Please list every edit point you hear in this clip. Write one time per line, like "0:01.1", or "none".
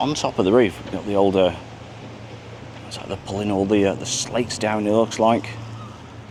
none